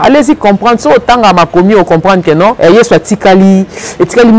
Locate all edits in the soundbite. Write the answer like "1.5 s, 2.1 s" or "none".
2.6 s